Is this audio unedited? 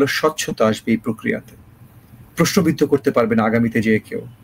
yes; 0 cuts

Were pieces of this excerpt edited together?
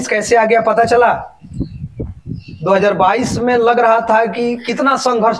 no; 0 cuts

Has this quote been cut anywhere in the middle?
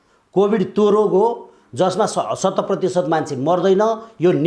no; 0 cuts

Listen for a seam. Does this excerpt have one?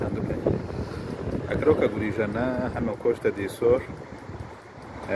no; 0 cuts

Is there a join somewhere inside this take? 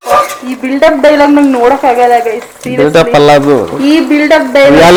no; 0 cuts

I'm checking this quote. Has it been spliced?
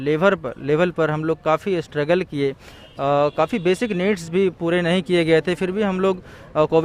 no; 0 cuts

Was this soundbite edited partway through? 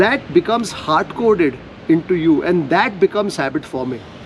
no; 0 cuts

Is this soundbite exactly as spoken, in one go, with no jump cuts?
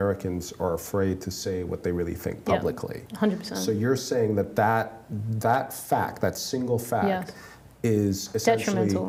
yes; 0 cuts

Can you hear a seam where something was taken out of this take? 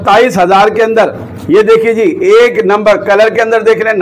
no; 0 cuts

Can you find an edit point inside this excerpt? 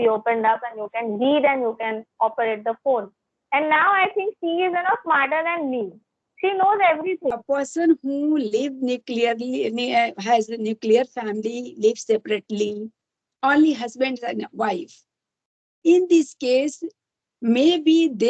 yes; 1 cut; at 7.4 s

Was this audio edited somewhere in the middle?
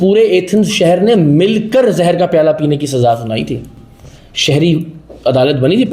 no; 0 cuts

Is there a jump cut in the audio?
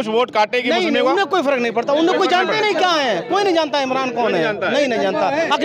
no; 0 cuts

